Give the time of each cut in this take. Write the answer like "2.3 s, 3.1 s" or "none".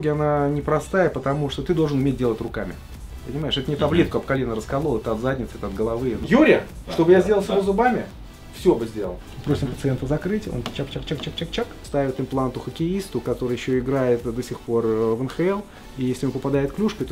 6.2 s, 9.1 s, 11.8 s